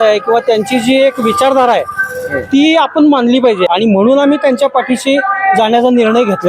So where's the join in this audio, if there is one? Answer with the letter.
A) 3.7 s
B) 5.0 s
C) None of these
A